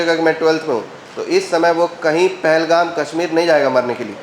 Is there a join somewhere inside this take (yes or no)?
no